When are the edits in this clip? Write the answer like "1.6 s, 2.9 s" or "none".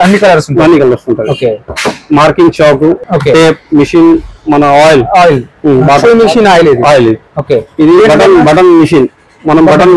3.0 s

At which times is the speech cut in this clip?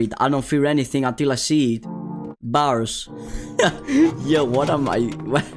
none

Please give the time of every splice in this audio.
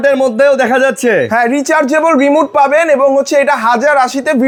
none

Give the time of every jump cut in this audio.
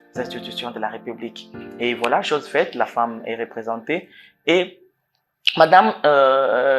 none

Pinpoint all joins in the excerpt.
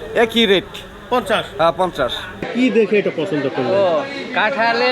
2.5 s

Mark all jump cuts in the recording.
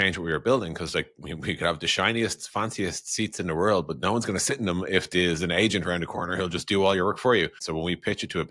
7.6 s

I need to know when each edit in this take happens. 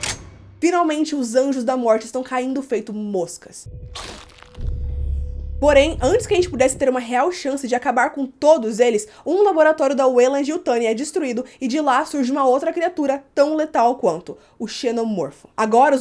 none

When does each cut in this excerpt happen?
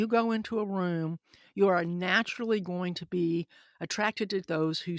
none

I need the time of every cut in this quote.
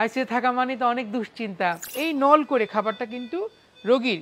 1.9 s

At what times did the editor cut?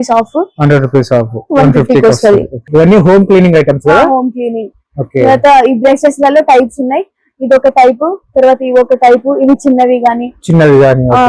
2.6 s

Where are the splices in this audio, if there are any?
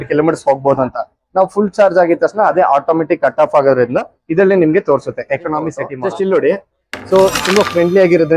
5.9 s

